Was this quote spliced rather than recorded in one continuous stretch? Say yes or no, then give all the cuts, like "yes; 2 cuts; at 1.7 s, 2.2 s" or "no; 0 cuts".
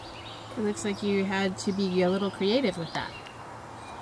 no; 0 cuts